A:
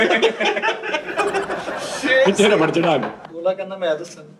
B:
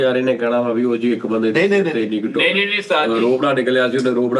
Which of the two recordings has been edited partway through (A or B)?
A